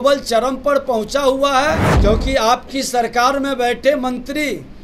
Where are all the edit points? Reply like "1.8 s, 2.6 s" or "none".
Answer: 1.9 s